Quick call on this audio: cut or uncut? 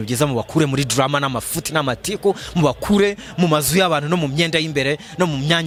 uncut